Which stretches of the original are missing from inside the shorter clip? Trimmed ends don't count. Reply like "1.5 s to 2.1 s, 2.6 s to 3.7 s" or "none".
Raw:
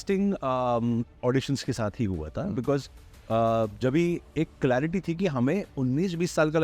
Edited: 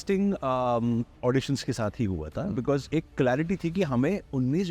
2.9 s to 4.3 s